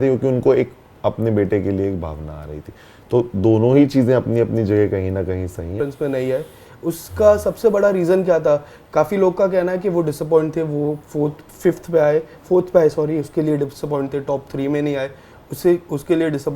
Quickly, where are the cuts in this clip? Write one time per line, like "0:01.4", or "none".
0:05.8